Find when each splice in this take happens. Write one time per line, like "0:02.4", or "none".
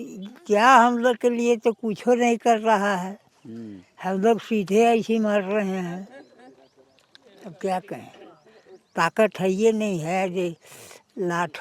none

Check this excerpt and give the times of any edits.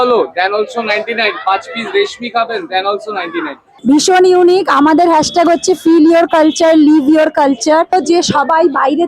0:03.6
0:07.9

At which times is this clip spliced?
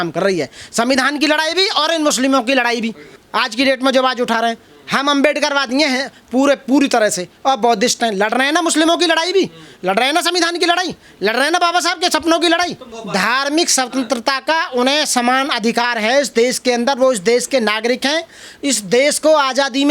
0:12.9

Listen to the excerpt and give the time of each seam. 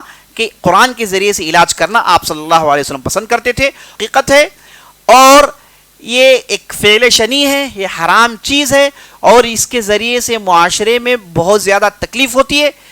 0:03.9

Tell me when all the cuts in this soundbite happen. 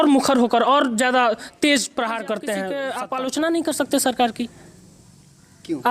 0:02.8

